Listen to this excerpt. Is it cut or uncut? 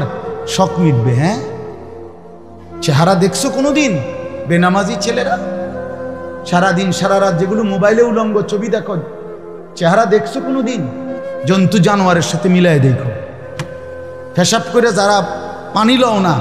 cut